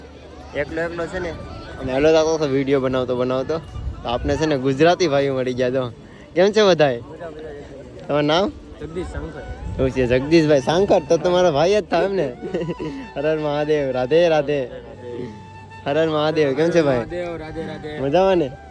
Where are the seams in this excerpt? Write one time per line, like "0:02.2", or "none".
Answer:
none